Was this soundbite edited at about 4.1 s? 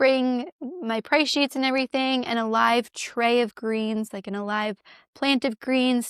yes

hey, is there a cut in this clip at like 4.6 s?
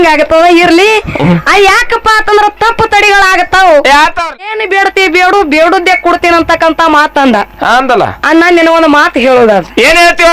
yes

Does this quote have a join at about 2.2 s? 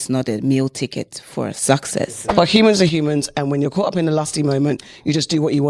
yes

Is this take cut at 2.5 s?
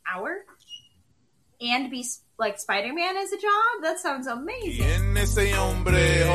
no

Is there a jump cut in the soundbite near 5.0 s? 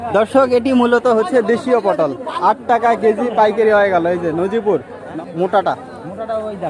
yes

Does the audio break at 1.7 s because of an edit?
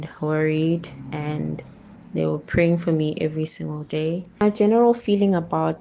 no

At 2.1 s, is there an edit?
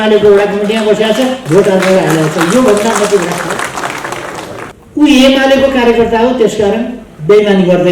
no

